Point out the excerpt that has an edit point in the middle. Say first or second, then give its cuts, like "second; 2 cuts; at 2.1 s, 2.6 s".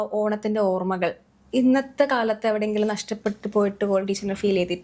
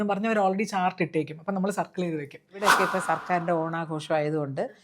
second; 1 cut; at 2.7 s